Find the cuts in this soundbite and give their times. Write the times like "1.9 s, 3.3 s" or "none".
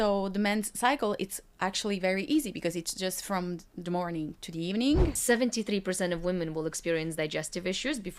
5.2 s

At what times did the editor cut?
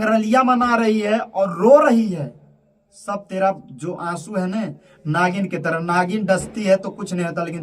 none

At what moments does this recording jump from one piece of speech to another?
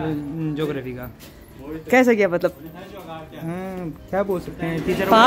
none

